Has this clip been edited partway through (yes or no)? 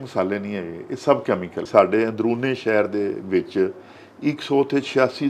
yes